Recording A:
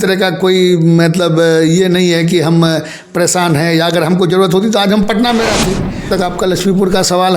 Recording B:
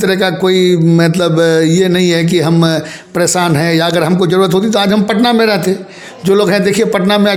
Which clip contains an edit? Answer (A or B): A